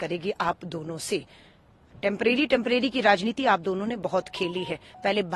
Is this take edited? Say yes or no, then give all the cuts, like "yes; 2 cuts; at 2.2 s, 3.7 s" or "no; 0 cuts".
no; 0 cuts